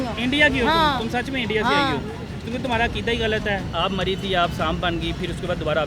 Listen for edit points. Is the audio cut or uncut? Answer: cut